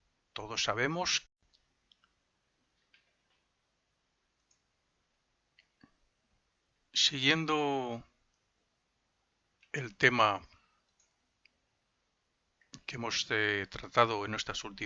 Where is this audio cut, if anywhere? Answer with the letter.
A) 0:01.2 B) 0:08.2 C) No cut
C